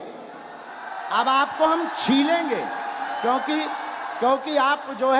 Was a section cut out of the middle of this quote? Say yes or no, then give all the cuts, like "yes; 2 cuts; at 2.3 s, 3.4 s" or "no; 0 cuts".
no; 0 cuts